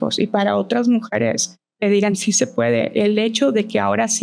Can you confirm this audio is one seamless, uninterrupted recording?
yes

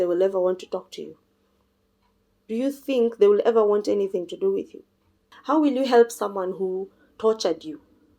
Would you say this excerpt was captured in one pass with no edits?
no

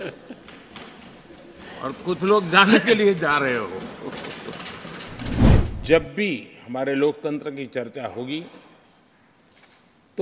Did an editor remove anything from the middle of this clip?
yes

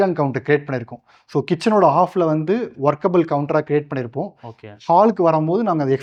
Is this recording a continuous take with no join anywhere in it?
yes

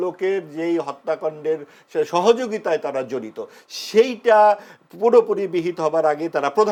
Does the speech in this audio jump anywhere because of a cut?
no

